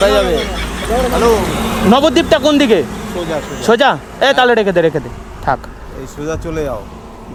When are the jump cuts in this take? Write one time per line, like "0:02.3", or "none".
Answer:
none